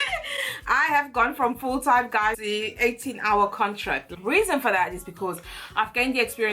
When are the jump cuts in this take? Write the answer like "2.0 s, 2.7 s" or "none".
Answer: 2.3 s, 4.1 s